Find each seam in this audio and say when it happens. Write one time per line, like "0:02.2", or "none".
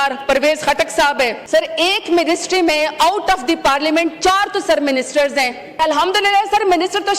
0:01.4
0:05.8